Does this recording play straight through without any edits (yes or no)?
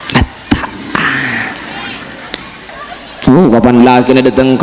no